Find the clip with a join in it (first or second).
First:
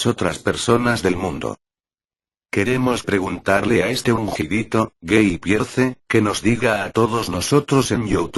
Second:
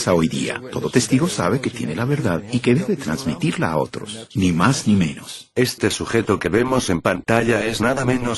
first